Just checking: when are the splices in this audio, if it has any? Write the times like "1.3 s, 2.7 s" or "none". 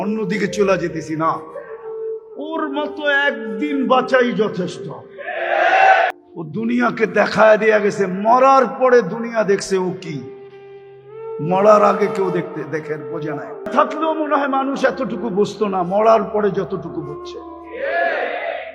6.2 s, 13.7 s